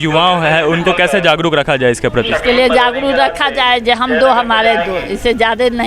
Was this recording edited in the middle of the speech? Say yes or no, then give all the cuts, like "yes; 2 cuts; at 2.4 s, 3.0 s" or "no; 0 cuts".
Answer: no; 0 cuts